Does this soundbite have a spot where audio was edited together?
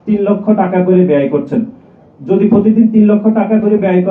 no; 0 cuts

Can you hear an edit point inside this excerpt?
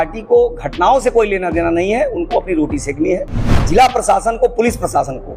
yes; 1 cut; at 3.6 s

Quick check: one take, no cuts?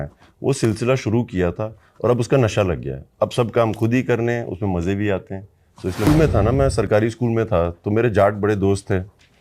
no; 1 cut; at 6.1 s

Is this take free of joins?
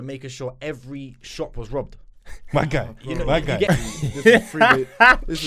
no; 1 cut; at 3.7 s

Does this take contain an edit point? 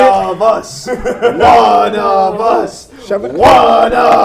no; 0 cuts

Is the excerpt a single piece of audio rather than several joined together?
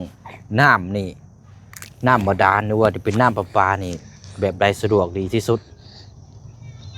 yes; 0 cuts

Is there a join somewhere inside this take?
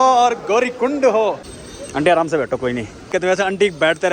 yes; 2 cuts; at 1.5 s, 3.1 s

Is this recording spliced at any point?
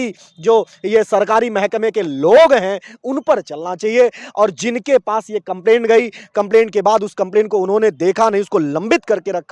no; 0 cuts

